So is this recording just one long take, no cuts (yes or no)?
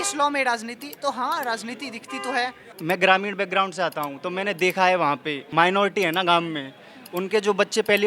no